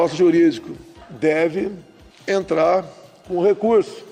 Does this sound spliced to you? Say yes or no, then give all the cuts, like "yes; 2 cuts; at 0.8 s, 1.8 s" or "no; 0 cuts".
no; 0 cuts